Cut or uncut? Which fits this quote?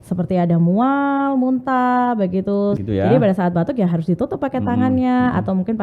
cut